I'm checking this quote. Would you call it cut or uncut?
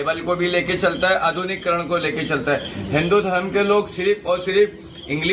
uncut